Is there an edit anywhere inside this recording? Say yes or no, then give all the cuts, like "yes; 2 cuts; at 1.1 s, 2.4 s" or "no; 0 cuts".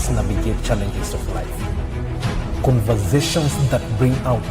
no; 0 cuts